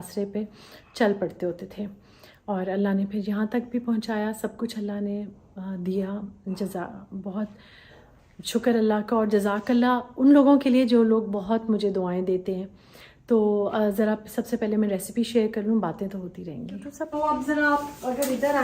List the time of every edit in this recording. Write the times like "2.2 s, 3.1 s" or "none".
17.1 s